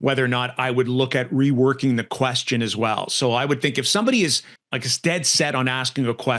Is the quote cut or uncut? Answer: uncut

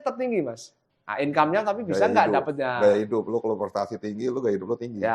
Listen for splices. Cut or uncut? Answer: uncut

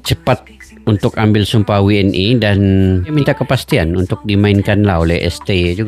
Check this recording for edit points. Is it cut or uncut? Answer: cut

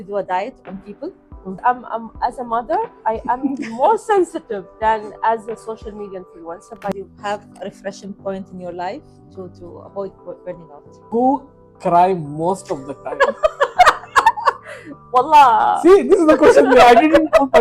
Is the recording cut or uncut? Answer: cut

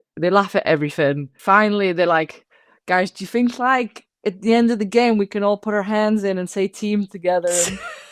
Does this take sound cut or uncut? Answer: cut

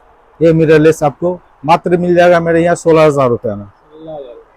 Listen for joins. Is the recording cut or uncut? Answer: uncut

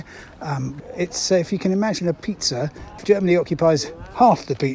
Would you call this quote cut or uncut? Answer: cut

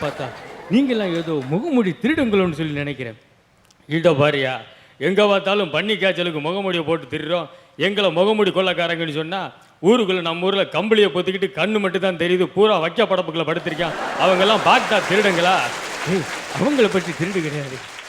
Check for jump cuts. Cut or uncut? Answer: uncut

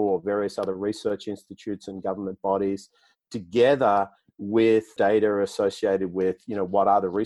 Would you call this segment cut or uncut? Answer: cut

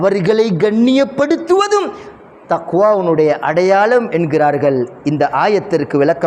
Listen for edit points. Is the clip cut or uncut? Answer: uncut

